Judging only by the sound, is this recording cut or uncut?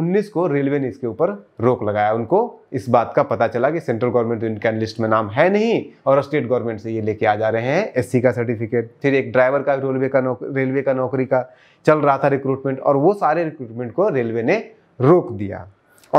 uncut